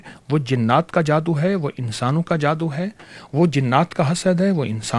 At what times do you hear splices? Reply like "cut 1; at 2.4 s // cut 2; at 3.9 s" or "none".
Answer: none